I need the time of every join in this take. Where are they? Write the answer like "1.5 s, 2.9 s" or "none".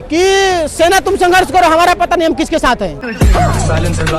3.0 s